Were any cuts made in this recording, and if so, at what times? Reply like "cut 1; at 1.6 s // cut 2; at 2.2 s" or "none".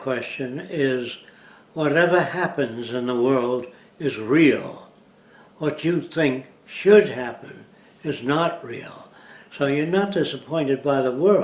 none